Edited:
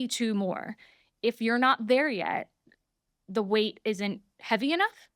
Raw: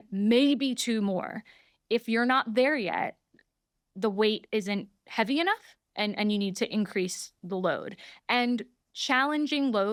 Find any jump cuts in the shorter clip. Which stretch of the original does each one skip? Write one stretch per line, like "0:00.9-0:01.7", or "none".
none